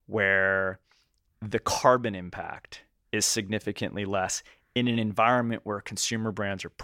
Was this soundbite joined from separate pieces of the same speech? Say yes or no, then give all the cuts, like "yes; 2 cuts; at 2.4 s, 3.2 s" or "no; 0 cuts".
yes; 1 cut; at 3.0 s